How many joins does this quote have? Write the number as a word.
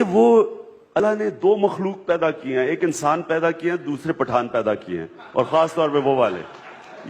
one